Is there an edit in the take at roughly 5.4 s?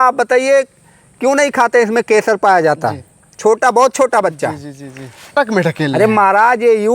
yes; 1 cut; at 5.4 s

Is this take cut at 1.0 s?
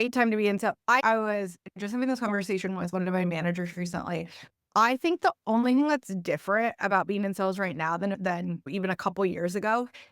yes; 2 cuts; at 1.0 s, 8.3 s

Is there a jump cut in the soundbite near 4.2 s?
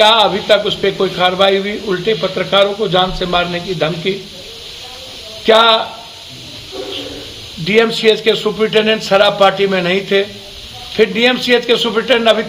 no; 0 cuts

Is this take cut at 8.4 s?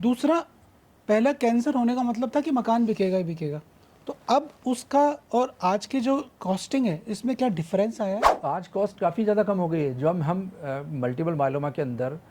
yes; 1 cut; at 8.4 s

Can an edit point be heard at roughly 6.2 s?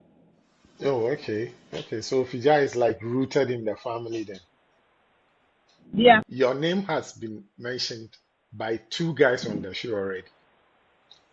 yes; 1 cut; at 6.2 s

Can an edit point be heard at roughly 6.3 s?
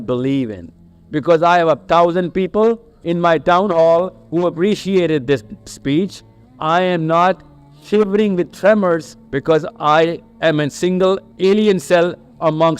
no; 3 cuts; at 9.2 s, 10.3 s, 11.3 s

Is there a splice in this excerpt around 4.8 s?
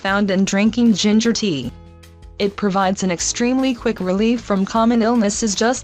no; 1 cut; at 3.1 s

